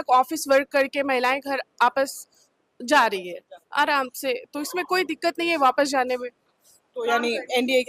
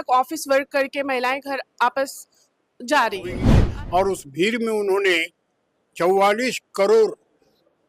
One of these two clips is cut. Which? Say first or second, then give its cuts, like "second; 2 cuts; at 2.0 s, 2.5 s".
second; 1 cut; at 3.6 s